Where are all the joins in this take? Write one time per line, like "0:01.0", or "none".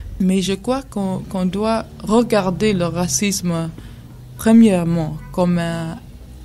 0:04.2